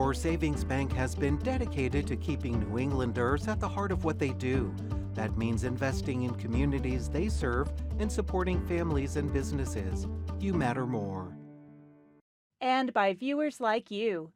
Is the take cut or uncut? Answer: uncut